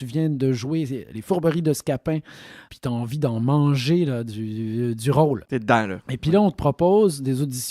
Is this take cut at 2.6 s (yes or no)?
yes